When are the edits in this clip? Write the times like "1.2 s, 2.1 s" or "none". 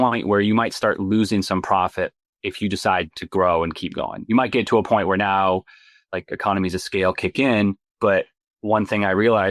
none